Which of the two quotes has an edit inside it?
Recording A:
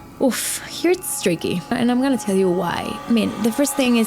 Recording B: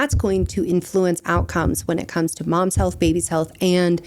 A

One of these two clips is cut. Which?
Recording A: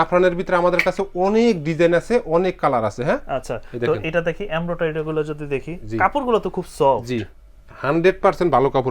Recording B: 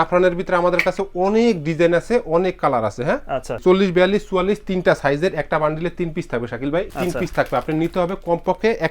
B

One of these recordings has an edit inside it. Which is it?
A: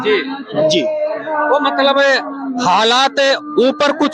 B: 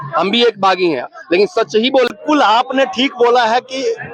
B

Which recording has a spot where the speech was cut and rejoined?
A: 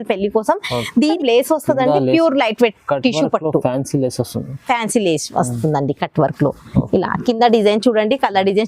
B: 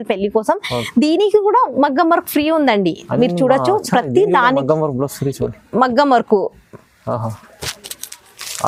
A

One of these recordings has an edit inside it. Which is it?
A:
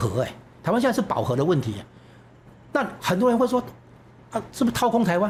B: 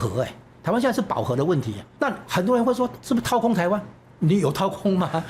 B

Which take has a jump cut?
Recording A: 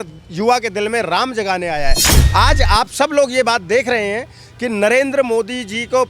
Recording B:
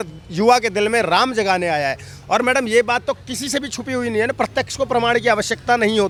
A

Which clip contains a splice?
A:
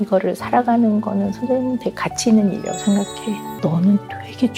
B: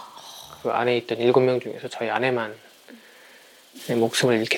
A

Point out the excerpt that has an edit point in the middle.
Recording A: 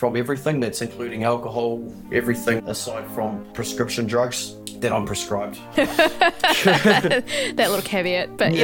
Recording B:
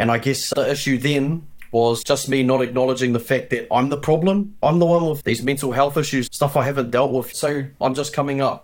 B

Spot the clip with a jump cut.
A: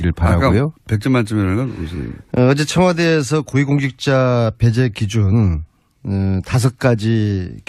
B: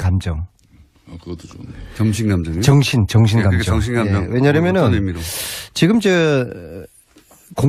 B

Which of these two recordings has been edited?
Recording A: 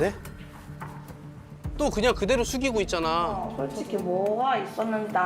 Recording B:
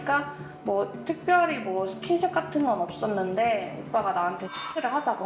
A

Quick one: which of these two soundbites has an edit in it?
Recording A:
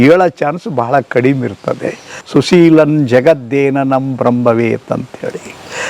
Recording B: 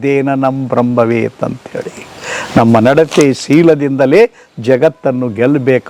A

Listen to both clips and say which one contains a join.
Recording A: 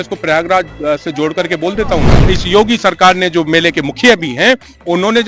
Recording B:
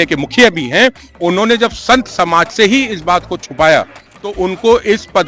A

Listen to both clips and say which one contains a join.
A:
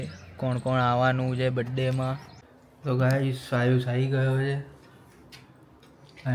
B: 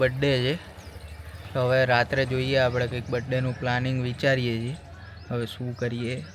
A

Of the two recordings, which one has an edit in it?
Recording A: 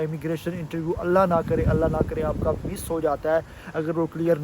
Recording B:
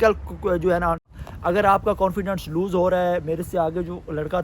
B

